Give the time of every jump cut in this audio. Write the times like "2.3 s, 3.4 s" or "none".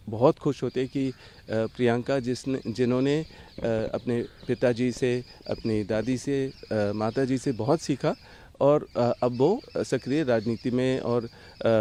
none